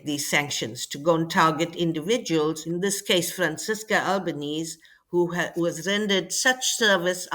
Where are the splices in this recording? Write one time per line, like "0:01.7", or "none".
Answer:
0:02.6